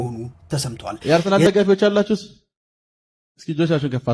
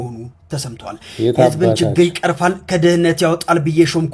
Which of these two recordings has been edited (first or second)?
first